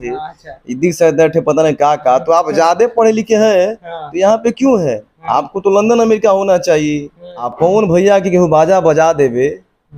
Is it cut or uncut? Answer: cut